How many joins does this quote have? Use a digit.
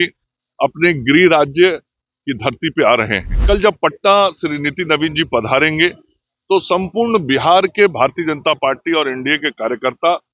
1